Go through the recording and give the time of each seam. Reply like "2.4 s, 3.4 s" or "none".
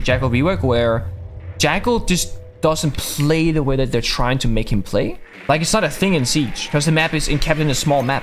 none